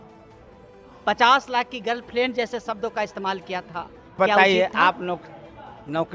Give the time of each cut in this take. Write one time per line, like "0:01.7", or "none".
0:04.2

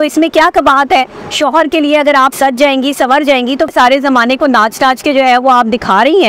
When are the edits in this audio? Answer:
0:03.7

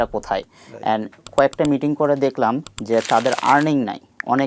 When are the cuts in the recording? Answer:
0:01.2
0:02.6

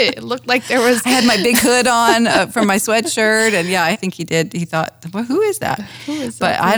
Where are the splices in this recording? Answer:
0:03.9

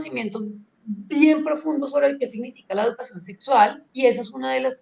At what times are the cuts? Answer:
none

